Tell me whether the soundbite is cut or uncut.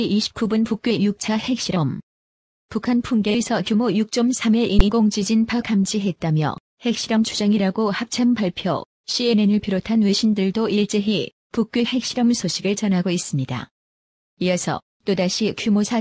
cut